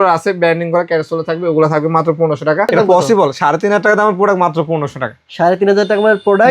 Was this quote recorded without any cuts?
no; 1 cut; at 2.7 s

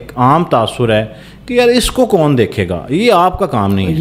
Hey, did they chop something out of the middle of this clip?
no; 0 cuts

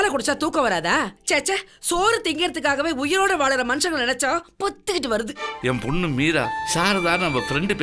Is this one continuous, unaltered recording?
no; 1 cut; at 5.5 s

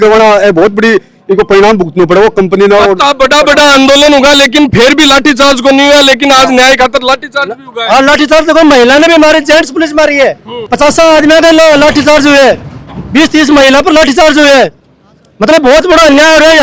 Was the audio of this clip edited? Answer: no; 0 cuts

